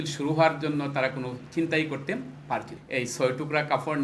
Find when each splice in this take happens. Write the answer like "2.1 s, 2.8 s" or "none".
2.8 s